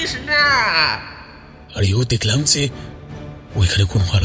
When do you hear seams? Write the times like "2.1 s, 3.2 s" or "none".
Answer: 1.1 s